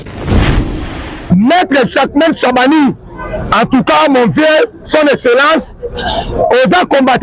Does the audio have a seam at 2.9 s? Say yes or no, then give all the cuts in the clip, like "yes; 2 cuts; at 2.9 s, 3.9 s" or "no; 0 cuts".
no; 1 cut; at 1.2 s